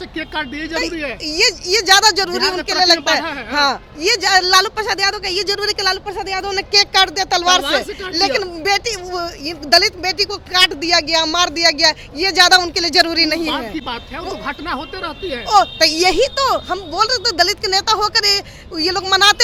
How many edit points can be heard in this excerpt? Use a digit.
0